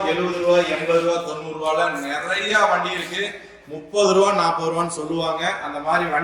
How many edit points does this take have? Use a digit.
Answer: 0